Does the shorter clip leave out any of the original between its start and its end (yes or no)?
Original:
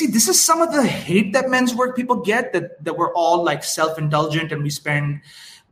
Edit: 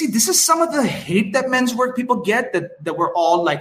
no